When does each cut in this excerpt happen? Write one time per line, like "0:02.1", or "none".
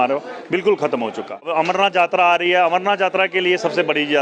0:01.5